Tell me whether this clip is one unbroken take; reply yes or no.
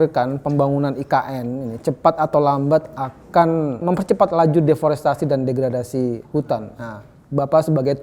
no